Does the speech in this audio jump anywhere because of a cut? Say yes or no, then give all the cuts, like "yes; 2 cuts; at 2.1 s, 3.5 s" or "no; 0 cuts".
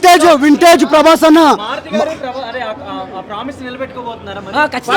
no; 0 cuts